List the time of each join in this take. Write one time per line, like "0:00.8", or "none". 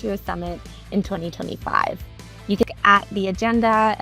0:02.7